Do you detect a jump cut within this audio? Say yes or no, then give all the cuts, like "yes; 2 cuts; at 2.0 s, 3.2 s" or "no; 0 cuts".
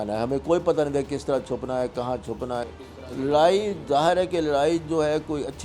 yes; 1 cut; at 2.7 s